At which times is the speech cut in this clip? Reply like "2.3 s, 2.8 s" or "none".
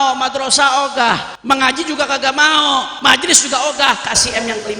1.3 s, 2.9 s